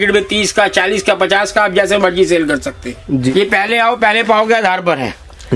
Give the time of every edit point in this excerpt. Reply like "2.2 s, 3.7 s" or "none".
2.9 s